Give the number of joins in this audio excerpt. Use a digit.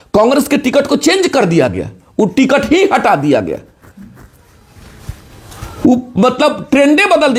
0